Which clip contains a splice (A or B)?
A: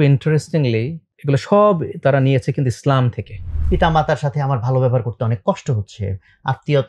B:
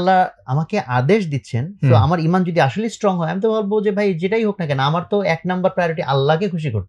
A